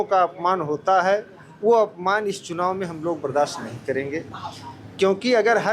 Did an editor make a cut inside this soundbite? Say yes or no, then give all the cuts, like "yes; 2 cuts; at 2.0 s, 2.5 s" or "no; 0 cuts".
no; 0 cuts